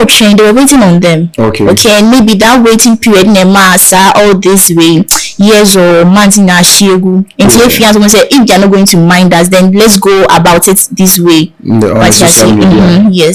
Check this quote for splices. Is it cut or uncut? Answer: uncut